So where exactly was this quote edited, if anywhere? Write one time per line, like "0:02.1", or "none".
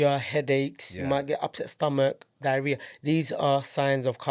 none